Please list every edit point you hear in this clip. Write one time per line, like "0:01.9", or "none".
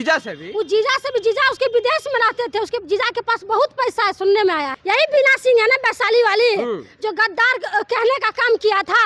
0:04.7